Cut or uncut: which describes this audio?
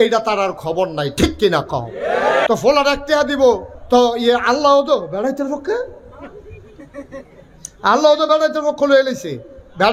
cut